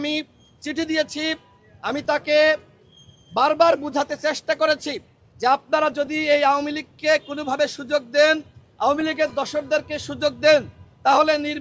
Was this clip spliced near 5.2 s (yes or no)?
no